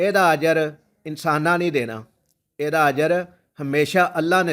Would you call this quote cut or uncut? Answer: uncut